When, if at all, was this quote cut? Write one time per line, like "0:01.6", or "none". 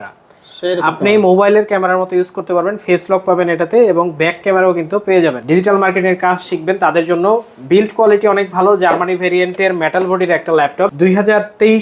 0:05.4
0:10.9